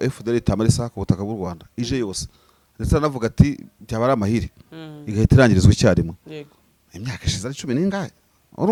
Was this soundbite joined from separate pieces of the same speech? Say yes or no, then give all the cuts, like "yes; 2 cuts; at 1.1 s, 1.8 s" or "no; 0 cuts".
no; 0 cuts